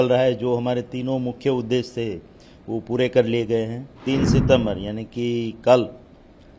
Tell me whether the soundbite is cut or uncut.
cut